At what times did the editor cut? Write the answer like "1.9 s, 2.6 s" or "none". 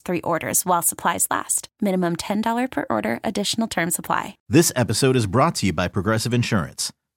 4.4 s